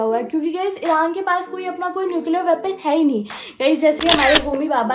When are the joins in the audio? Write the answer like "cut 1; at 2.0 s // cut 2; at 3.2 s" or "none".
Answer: cut 1; at 4.0 s